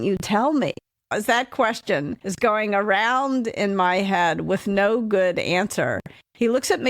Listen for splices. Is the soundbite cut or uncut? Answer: cut